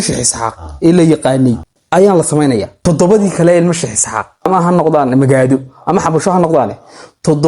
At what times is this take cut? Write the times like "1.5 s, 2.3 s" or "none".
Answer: 1.7 s, 2.8 s, 4.5 s